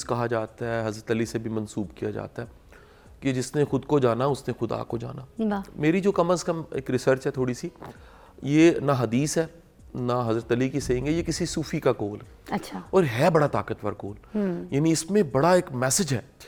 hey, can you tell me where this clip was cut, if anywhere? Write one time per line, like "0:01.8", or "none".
none